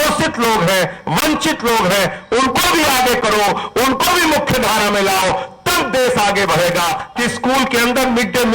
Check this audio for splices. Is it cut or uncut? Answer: cut